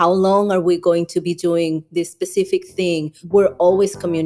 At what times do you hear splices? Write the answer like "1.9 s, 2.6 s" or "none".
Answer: 3.2 s